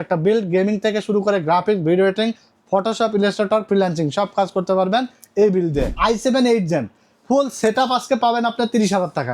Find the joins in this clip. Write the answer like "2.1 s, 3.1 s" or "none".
5.9 s